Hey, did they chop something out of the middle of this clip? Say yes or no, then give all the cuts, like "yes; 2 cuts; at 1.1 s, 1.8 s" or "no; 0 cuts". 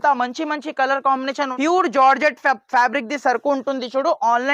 yes; 1 cut; at 1.5 s